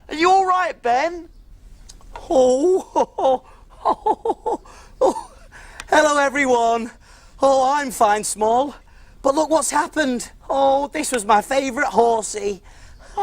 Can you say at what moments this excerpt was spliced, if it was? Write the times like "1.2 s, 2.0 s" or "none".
6.2 s